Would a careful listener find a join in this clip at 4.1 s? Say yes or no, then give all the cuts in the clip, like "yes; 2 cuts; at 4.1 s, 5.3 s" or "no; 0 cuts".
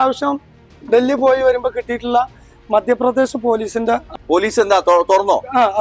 yes; 1 cut; at 4.1 s